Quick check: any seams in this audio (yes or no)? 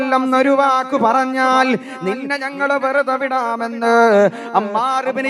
no